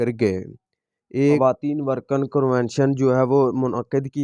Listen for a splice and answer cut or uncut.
cut